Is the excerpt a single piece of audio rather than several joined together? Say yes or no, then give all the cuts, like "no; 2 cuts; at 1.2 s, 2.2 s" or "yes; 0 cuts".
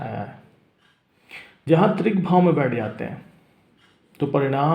yes; 0 cuts